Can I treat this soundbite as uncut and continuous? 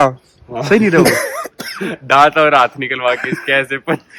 yes; 0 cuts

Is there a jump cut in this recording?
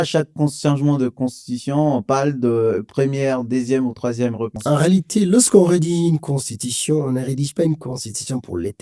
yes; 1 cut; at 4.5 s

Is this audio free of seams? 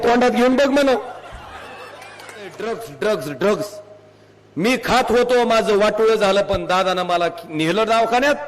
no; 1 cut; at 2.6 s

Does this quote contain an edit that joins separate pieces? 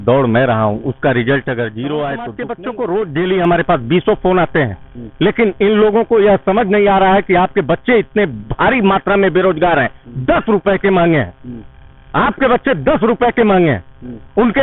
yes; 1 cut; at 2.4 s

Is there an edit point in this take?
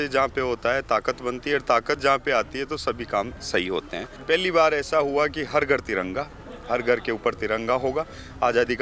yes; 1 cut; at 4.1 s

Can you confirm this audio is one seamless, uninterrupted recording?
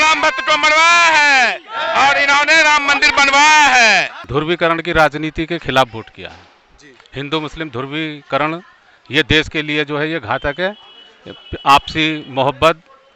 no; 1 cut; at 4.1 s

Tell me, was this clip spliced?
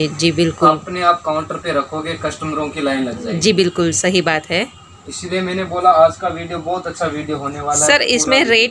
no; 0 cuts

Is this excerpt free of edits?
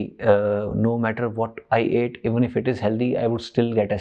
yes; 0 cuts

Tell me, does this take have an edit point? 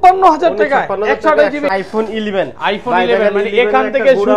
yes; 1 cut; at 1.7 s

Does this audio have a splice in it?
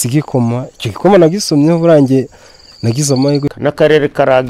yes; 1 cut; at 3.5 s

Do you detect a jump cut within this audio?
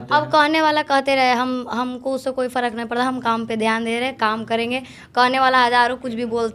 no; 0 cuts

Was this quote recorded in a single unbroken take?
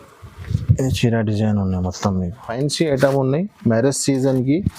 no; 1 cut; at 2.4 s

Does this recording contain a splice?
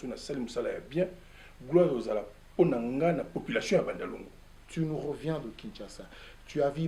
yes; 1 cut; at 4.6 s

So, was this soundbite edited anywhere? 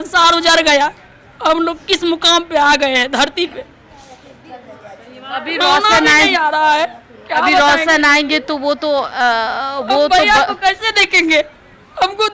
no; 0 cuts

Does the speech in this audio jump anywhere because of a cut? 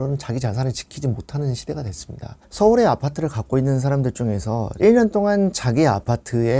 yes; 2 cuts; at 2.4 s, 4.7 s

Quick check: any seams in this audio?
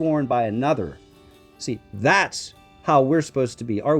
no; 0 cuts

